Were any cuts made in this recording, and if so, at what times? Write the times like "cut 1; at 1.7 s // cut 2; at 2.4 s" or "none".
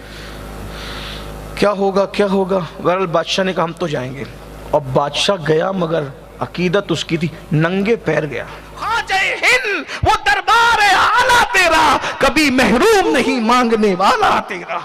cut 1; at 8.7 s